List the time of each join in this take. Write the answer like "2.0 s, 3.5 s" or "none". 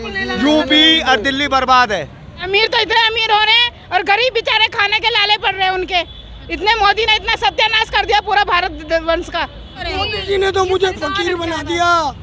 2.4 s, 9.8 s